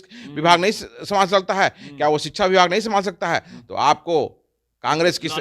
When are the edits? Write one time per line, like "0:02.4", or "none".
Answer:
none